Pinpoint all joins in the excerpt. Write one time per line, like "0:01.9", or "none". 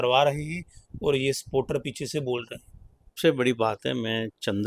0:03.2